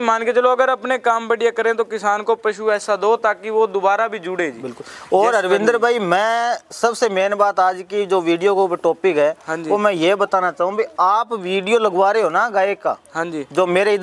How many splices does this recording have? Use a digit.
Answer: 0